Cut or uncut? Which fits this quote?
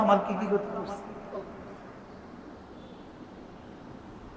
uncut